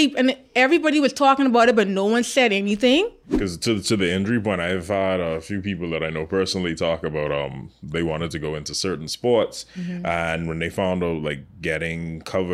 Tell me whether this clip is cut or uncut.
cut